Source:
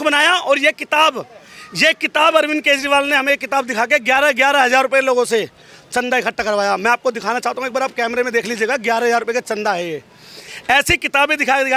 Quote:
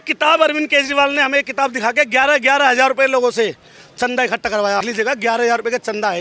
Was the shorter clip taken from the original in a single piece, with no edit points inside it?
no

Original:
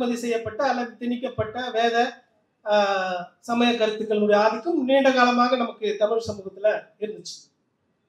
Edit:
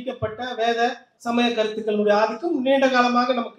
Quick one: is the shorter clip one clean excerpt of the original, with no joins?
no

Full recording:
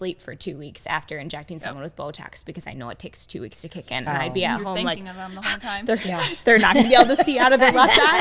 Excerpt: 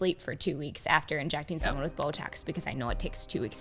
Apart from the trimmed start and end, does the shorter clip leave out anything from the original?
no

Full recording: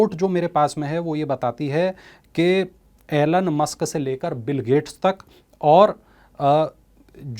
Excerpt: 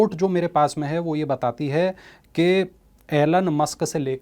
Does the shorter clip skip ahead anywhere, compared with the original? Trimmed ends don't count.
no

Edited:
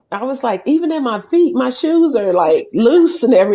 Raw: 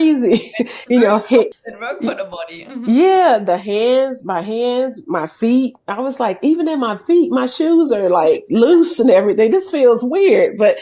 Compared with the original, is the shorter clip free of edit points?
yes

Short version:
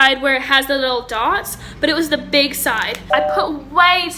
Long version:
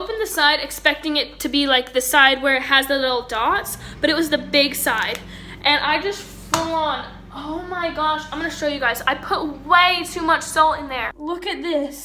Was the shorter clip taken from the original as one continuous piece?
no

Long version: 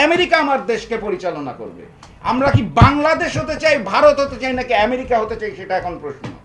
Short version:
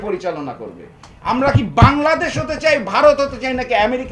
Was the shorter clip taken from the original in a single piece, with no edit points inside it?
yes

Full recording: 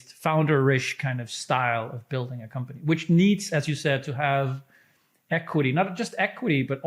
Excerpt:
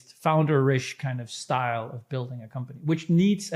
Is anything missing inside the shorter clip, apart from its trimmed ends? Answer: no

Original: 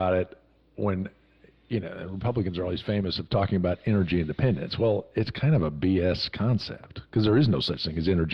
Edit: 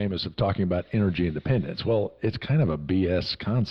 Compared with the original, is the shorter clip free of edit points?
yes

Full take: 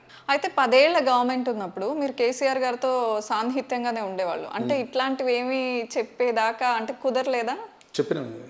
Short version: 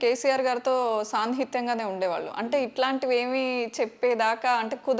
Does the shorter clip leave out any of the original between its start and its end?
no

